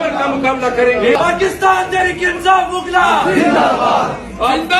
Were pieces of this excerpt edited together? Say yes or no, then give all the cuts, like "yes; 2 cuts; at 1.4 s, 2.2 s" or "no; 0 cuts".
yes; 1 cut; at 1.2 s